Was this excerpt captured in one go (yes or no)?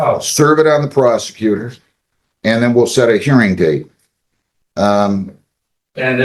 yes